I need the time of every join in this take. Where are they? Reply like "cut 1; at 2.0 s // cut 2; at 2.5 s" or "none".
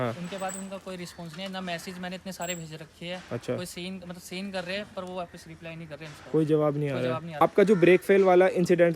cut 1; at 7.4 s